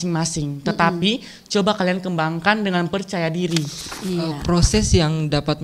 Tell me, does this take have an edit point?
yes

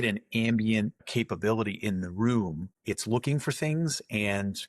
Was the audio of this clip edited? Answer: yes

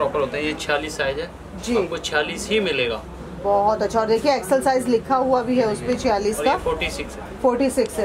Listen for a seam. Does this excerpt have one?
no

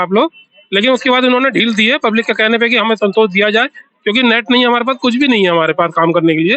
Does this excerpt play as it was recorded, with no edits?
yes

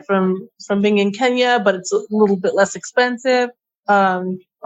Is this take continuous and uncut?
yes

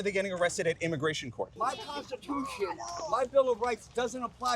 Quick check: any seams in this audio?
yes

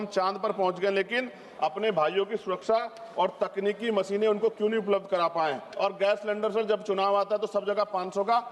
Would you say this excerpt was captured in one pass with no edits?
no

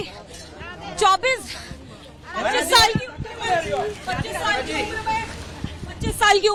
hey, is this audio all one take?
yes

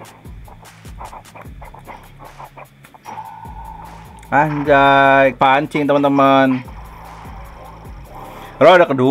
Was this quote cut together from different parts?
yes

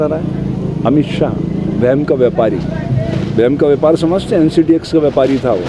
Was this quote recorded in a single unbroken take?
yes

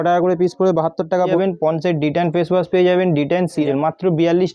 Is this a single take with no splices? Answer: no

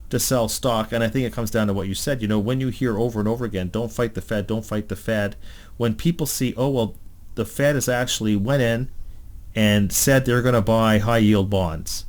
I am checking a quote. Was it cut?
no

